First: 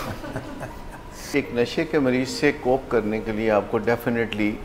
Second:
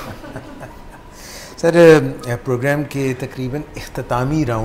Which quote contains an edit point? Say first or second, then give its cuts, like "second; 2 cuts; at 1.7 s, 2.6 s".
first; 1 cut; at 1.1 s